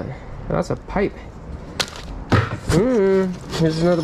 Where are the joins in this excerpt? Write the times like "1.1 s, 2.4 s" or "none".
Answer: 2.0 s